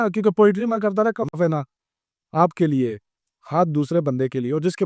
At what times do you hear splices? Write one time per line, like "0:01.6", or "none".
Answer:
0:01.3